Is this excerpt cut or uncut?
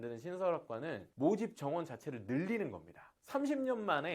cut